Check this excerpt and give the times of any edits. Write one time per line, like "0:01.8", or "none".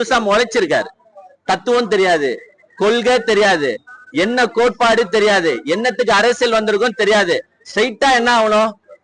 none